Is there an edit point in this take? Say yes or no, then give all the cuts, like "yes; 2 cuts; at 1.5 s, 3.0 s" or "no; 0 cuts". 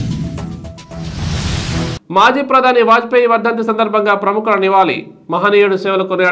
yes; 1 cut; at 1.9 s